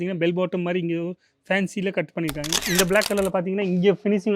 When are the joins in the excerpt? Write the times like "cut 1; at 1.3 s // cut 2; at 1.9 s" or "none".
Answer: cut 1; at 2.6 s